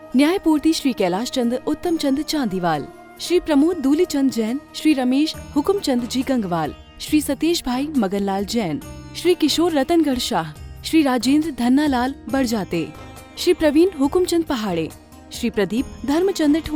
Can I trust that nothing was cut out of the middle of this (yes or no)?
yes